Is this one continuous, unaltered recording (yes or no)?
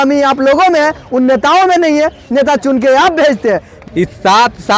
no